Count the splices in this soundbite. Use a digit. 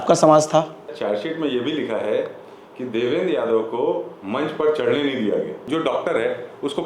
2